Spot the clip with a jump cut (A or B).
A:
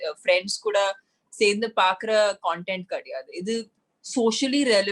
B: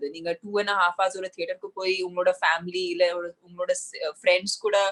A